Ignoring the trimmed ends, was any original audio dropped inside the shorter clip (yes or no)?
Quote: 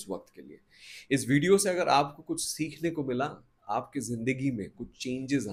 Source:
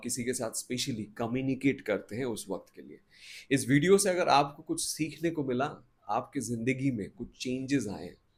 no